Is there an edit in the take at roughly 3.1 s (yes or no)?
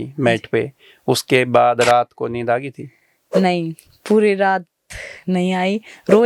no